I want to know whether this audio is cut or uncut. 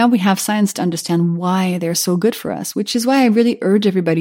uncut